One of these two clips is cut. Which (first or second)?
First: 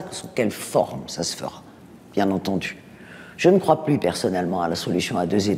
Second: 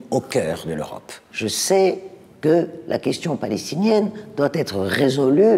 second